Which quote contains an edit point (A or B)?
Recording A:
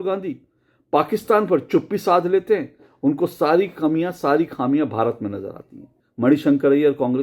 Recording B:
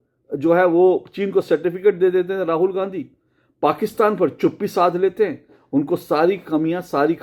A